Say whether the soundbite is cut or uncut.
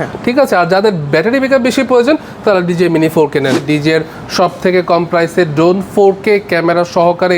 cut